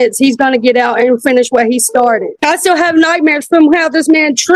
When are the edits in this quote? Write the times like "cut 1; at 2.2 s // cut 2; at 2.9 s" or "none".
cut 1; at 2.3 s